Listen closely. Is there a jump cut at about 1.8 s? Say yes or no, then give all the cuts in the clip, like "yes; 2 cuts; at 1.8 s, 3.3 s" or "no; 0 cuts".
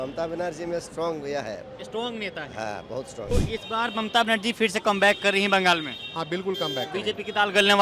no; 1 cut; at 3.3 s